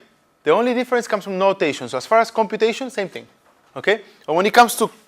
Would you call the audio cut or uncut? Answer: uncut